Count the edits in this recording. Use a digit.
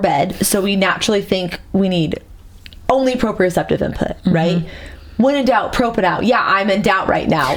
0